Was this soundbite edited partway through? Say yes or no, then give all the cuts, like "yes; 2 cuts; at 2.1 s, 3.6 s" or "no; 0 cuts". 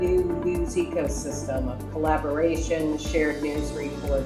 no; 0 cuts